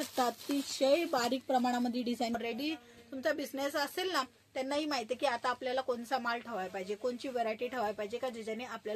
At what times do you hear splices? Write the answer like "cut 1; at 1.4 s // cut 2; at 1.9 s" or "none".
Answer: cut 1; at 2.3 s